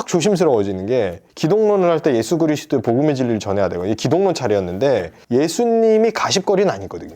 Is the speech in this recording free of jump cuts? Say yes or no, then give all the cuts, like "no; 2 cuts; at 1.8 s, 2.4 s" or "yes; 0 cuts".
no; 2 cuts; at 1.2 s, 5.2 s